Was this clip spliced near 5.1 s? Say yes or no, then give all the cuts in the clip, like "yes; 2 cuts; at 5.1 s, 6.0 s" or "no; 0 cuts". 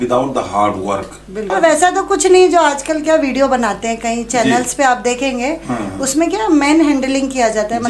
no; 1 cut; at 1.5 s